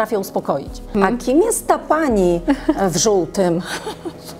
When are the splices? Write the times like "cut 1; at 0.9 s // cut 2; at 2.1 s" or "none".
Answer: cut 1; at 0.9 s

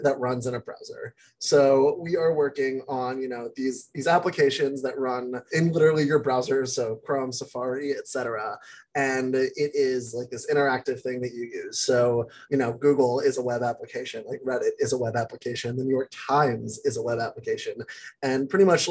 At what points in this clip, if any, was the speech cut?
cut 1; at 5.5 s // cut 2; at 12.4 s

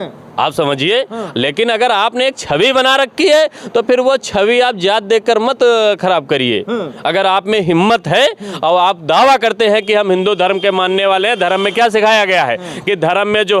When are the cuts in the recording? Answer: none

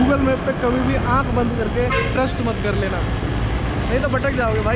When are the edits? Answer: none

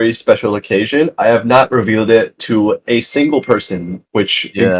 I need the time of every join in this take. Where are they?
none

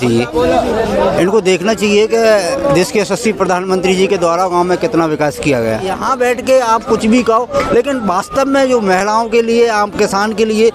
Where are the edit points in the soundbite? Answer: cut 1; at 6.0 s

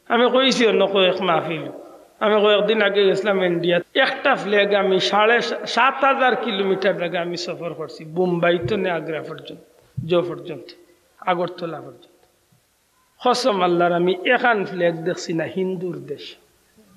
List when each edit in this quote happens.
cut 1; at 3.8 s

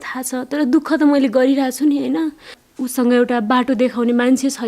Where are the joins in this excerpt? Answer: cut 1; at 2.6 s

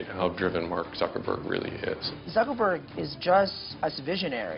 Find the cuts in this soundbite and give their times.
cut 1; at 2.1 s // cut 2; at 3.6 s

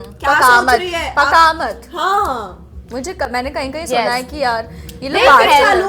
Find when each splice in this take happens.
none

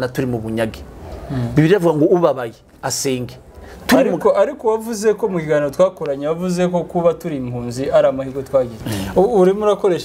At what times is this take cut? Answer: cut 1; at 8.8 s

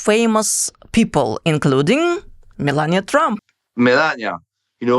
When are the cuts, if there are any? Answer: cut 1; at 3.4 s

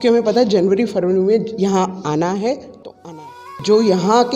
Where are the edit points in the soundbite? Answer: cut 1; at 3.1 s

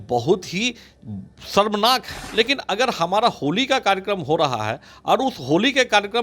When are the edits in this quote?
cut 1; at 2.2 s

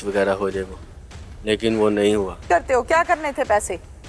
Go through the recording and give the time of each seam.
cut 1; at 2.5 s

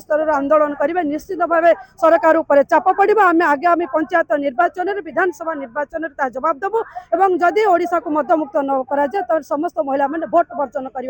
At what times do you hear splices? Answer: none

